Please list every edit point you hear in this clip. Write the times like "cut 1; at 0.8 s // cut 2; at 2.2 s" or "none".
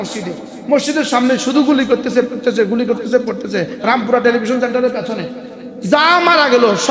none